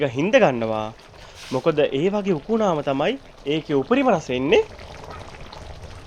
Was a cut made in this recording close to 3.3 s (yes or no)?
no